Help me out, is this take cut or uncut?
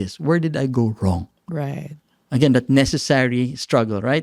uncut